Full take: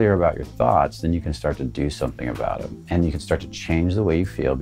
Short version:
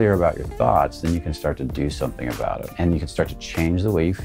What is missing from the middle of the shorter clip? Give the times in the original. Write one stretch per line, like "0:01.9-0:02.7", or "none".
0:02.7-0:02.8